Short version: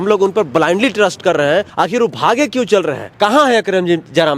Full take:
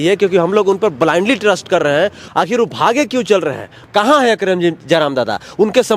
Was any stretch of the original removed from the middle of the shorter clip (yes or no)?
yes